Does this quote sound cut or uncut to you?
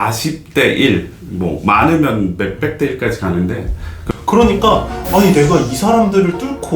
cut